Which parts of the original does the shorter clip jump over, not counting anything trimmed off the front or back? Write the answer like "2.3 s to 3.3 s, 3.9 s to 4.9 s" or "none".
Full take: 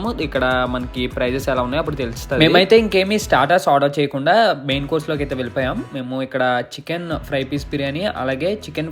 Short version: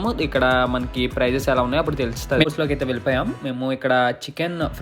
2.4 s to 4.9 s